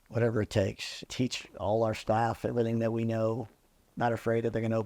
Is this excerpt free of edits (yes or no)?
no